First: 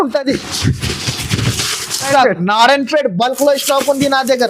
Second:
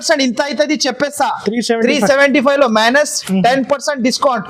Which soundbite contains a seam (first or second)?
first